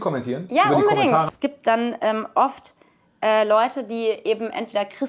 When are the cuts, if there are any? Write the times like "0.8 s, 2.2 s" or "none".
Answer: 1.3 s